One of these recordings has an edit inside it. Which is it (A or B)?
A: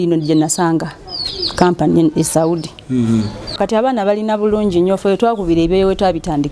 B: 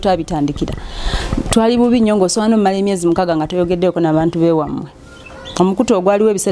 A